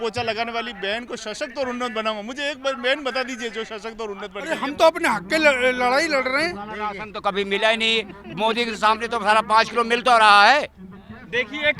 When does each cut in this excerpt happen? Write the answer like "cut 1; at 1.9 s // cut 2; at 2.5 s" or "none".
cut 1; at 4.5 s